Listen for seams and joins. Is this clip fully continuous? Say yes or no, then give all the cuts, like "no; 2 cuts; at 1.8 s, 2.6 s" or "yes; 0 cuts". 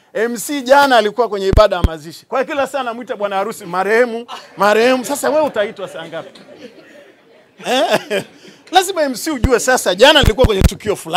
yes; 0 cuts